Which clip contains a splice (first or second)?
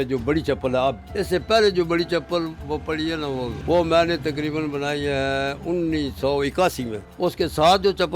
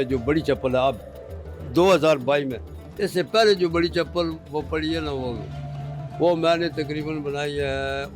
first